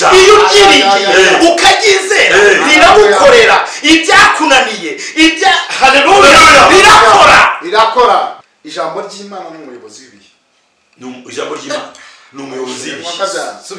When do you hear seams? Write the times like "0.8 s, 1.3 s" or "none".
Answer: 8.3 s

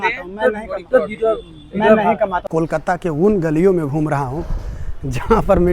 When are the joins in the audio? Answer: 2.4 s

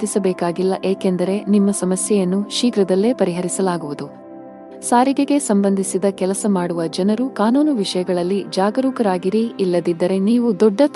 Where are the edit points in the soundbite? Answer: 4.2 s

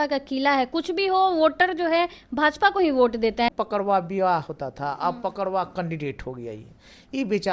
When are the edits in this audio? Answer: 3.5 s

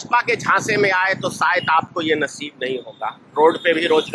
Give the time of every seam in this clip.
none

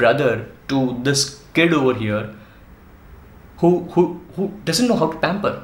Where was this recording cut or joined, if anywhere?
none

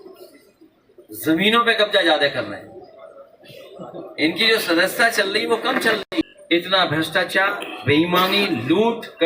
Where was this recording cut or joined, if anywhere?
6.0 s

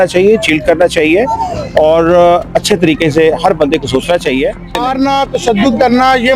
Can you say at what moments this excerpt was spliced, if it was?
4.8 s

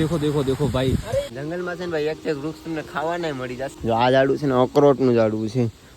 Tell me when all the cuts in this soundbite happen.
1.3 s, 3.7 s

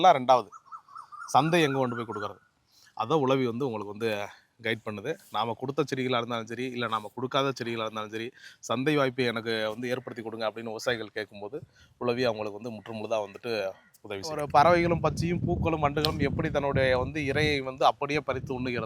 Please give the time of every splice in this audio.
14.4 s

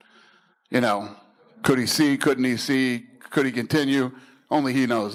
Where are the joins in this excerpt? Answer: none

